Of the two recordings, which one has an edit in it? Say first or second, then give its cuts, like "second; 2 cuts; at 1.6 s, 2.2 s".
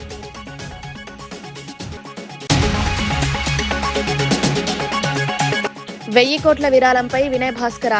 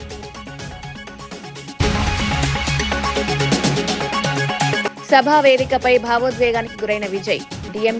second; 2 cuts; at 1.8 s, 4.7 s